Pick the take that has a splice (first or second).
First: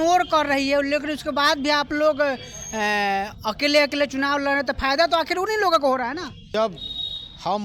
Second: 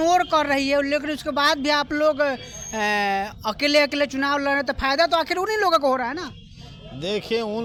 first